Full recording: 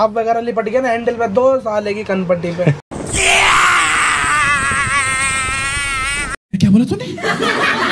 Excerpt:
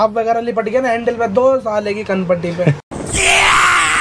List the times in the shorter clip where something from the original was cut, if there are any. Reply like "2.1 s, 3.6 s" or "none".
none